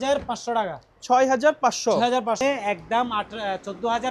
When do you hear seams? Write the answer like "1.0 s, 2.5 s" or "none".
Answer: 2.4 s